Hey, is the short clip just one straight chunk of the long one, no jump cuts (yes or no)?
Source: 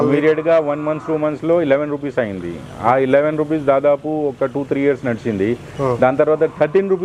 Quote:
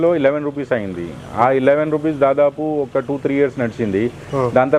yes